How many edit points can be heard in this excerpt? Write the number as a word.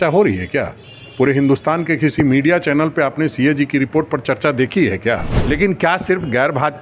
one